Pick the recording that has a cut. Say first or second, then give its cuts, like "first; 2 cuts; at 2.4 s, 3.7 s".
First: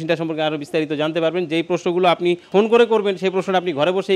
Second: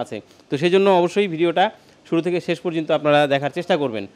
first; 1 cut; at 2.5 s